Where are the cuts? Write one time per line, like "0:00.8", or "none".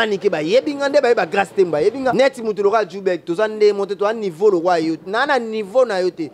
0:02.1